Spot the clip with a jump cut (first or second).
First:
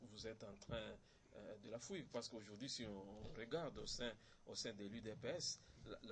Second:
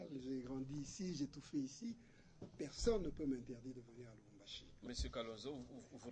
second